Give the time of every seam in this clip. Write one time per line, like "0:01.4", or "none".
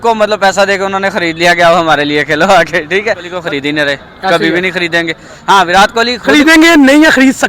0:03.3